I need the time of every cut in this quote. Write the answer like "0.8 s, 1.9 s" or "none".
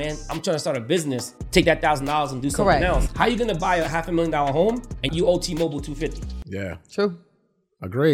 1.3 s, 3.1 s, 5.1 s